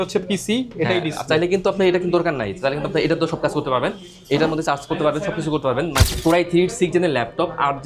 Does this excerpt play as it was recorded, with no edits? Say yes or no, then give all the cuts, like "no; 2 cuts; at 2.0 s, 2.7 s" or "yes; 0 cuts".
no; 1 cut; at 6.1 s